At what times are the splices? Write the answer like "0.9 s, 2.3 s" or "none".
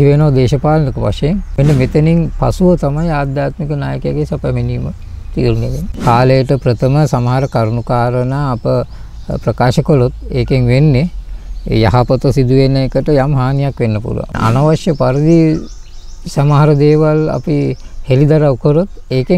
1.5 s, 5.8 s, 14.4 s